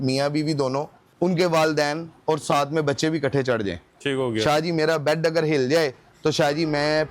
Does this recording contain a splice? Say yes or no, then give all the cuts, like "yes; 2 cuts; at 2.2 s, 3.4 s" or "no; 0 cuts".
yes; 1 cut; at 1.0 s